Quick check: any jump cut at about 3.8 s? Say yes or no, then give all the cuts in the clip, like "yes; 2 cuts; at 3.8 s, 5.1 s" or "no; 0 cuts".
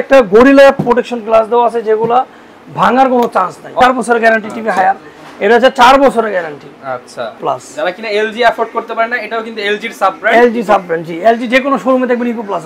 yes; 2 cuts; at 3.8 s, 7.4 s